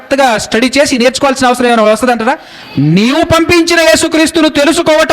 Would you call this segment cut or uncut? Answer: cut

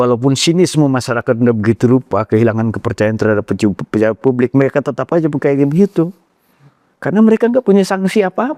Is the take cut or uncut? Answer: uncut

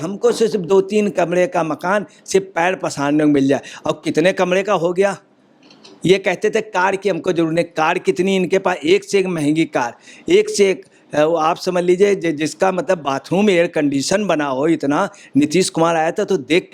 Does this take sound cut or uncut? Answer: uncut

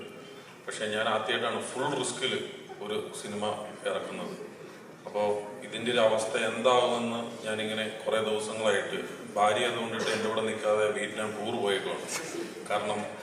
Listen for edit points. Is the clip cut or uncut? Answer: uncut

